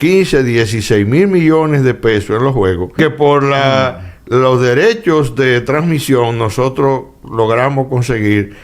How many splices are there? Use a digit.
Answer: 1